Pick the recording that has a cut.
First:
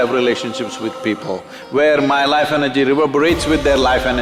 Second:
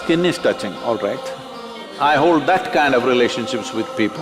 second; 1 cut; at 1.9 s

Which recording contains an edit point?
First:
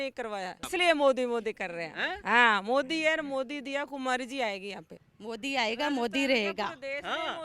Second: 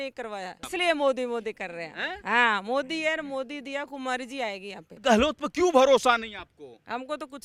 first; 1 cut; at 4.9 s

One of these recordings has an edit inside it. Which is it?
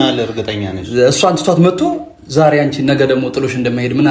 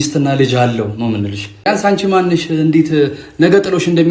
second; 1 cut; at 1.7 s

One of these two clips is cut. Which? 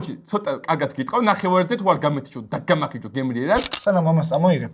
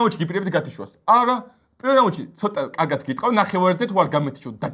first; 1 cut; at 3.7 s

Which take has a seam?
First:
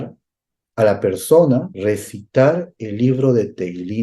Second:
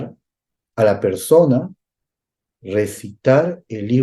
first; 1 cut; at 1.7 s

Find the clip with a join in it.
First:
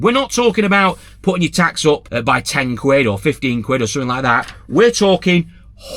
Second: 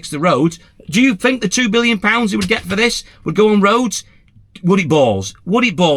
first; 1 cut; at 2.1 s

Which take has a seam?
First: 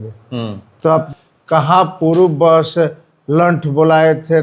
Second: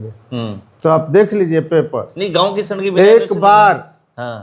first; 1 cut; at 1.1 s

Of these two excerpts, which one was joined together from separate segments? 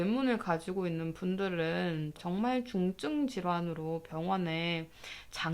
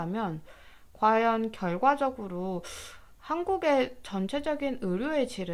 first; 1 cut; at 2.2 s

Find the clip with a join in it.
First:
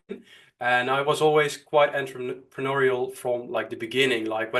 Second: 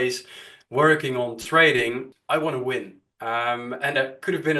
second; 1 cut; at 2.1 s

